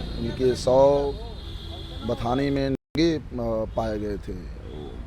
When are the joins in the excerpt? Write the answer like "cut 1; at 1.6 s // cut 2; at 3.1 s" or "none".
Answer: none